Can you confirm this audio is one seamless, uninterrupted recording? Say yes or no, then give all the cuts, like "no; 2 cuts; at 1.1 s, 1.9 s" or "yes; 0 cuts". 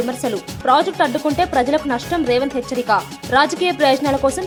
yes; 0 cuts